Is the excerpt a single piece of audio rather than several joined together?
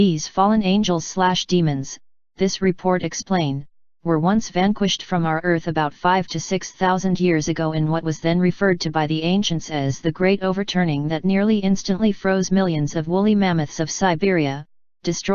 yes; 0 cuts

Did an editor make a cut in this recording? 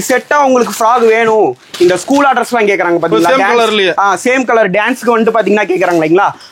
no; 0 cuts

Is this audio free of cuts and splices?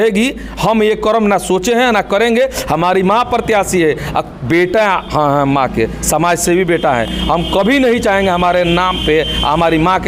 yes; 0 cuts

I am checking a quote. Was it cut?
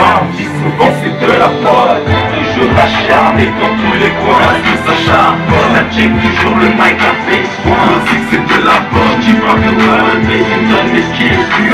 no; 0 cuts

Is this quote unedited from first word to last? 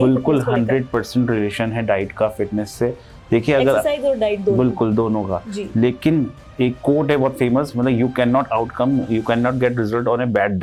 yes; 0 cuts

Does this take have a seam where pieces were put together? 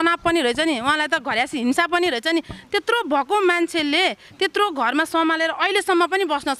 no; 0 cuts

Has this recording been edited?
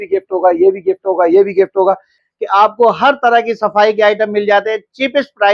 yes; 1 cut; at 2.2 s

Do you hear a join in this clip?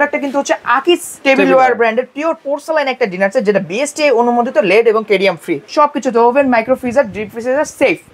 yes; 2 cuts; at 1.1 s, 5.6 s

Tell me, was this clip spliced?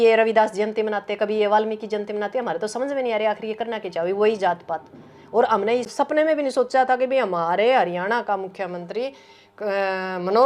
yes; 1 cut; at 5.9 s

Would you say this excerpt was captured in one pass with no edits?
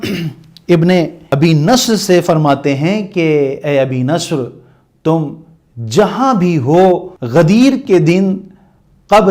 no; 2 cuts; at 1.2 s, 7.1 s

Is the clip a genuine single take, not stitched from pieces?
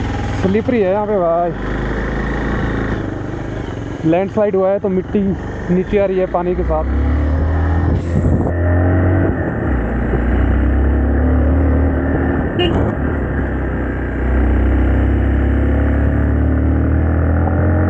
yes; 0 cuts

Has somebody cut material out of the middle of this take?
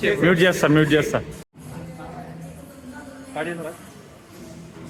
no; 0 cuts

